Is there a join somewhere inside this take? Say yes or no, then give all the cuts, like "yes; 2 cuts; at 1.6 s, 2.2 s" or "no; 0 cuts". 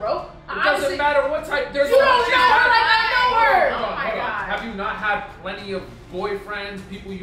no; 0 cuts